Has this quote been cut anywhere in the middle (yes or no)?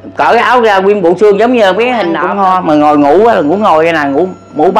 yes